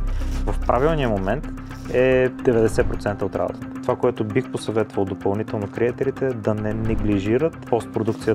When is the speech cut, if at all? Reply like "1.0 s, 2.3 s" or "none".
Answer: none